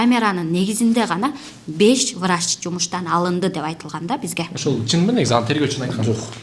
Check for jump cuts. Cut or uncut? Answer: uncut